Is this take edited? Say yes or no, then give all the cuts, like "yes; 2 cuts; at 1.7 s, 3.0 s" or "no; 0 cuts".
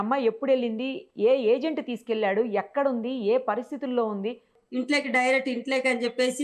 yes; 1 cut; at 4.5 s